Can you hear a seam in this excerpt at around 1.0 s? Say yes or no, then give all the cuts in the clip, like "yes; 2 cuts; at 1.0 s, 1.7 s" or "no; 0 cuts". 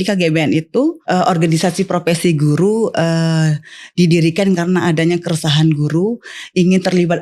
yes; 1 cut; at 1.0 s